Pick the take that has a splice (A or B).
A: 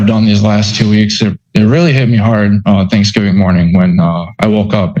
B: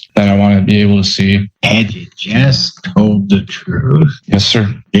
B